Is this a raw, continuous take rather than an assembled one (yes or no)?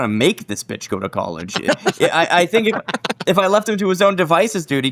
yes